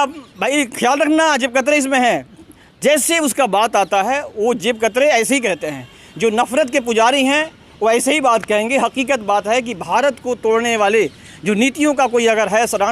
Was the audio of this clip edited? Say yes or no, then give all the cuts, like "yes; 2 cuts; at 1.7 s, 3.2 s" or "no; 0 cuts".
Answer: no; 0 cuts